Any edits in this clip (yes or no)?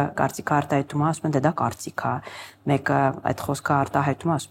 no